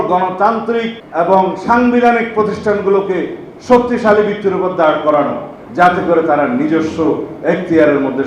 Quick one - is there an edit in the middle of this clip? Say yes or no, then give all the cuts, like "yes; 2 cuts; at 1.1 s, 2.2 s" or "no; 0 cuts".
yes; 1 cut; at 1.0 s